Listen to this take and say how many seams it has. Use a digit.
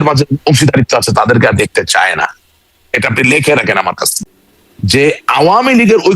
1